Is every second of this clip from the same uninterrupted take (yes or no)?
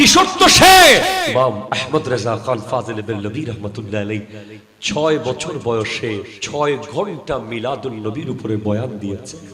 no